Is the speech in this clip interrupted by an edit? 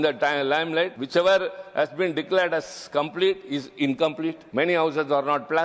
yes; 2 cuts; at 1.0 s, 4.4 s

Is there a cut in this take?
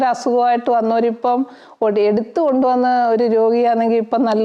no; 0 cuts

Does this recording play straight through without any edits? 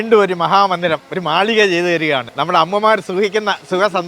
no; 2 cuts; at 1.1 s, 2.3 s

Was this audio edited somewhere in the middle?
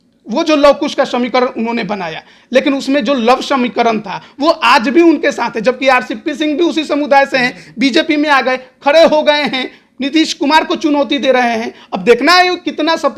no; 0 cuts

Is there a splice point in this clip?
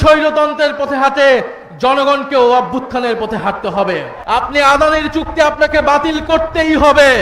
yes; 1 cut; at 4.1 s

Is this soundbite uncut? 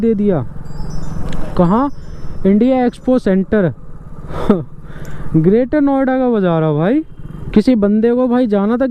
yes; 0 cuts

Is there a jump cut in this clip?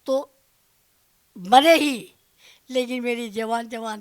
no; 0 cuts

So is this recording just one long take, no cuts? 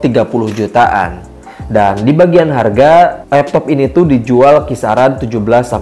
yes; 0 cuts

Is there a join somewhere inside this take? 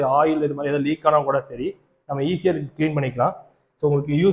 no; 0 cuts

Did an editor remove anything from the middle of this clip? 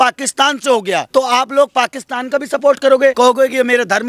yes; 2 cuts; at 1.1 s, 3.1 s

